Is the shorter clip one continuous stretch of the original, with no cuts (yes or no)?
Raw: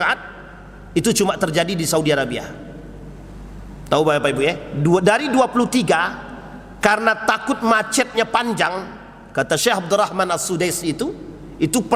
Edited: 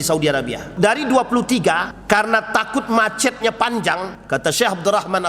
no